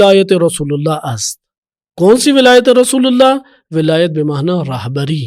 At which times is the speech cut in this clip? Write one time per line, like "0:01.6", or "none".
none